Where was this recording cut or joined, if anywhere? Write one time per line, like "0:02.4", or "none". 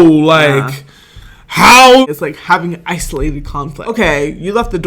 0:02.1
0:03.8